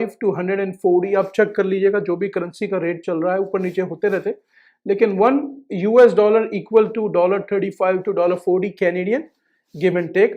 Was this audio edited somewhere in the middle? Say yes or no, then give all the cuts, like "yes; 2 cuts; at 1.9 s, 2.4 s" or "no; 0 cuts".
no; 0 cuts